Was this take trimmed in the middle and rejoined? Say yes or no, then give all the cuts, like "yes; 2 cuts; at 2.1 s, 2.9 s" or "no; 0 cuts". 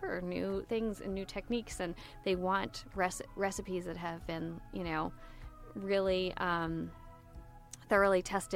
no; 0 cuts